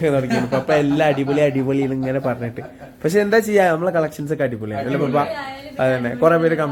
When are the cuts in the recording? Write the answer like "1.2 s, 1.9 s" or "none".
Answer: none